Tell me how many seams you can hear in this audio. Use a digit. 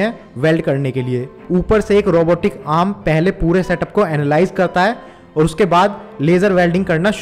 1